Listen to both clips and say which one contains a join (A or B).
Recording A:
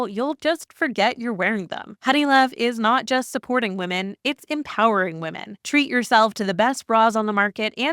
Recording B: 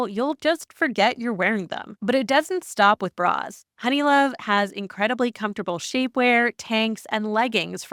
A